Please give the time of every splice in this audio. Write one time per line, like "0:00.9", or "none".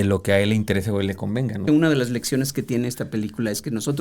0:01.6